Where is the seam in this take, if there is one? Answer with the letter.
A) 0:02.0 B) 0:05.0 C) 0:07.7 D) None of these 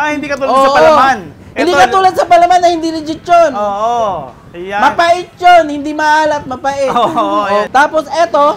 C